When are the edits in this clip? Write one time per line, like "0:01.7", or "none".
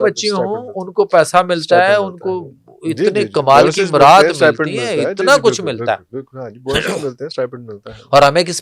none